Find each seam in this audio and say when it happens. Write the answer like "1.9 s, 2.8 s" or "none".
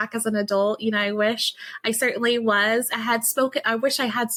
none